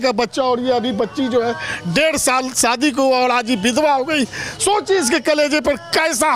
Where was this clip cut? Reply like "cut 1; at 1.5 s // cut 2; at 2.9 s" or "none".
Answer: none